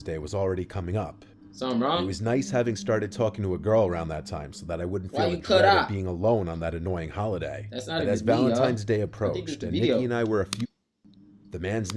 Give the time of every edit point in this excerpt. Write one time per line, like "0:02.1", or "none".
0:10.6